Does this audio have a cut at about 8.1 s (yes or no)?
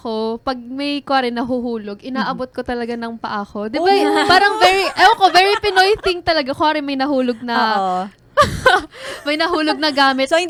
no